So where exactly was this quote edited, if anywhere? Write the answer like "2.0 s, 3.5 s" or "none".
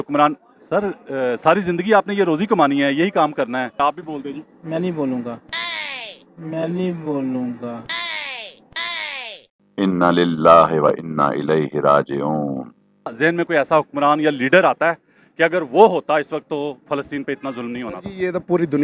3.8 s, 7.9 s, 13.1 s